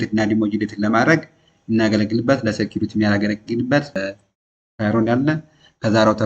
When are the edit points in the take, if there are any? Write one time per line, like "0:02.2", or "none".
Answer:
0:04.0